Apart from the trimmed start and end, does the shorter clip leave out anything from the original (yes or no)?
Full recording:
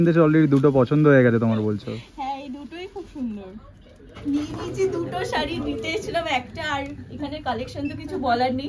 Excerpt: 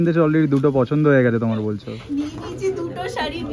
yes